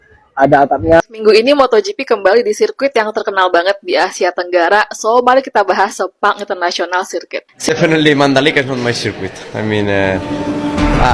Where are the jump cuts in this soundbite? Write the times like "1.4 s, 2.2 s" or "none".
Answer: 1.0 s, 7.5 s